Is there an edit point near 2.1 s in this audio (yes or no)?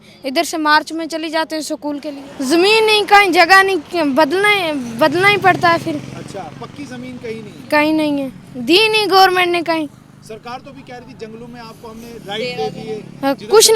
yes